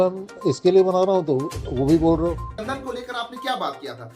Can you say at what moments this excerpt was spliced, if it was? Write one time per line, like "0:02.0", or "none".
0:02.5